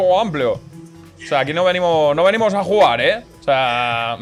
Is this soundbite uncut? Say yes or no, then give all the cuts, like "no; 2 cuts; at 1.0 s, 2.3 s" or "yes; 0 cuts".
yes; 0 cuts